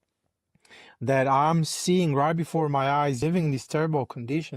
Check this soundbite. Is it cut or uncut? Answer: cut